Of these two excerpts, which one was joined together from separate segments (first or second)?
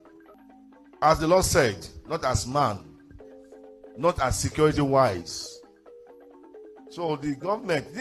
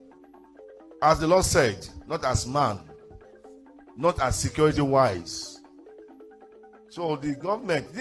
second